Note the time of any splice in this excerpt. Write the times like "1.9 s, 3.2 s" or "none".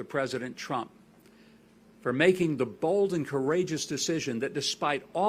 none